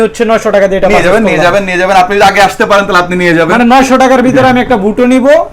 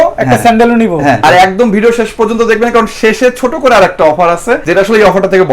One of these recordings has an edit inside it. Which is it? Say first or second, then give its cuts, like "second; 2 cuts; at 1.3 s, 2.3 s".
second; 2 cuts; at 1.2 s, 4.6 s